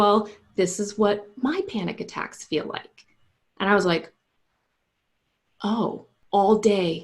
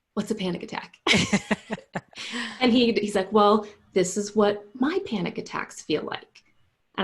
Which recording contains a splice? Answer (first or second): first